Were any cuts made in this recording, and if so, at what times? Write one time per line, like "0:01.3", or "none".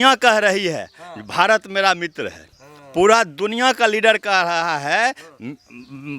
none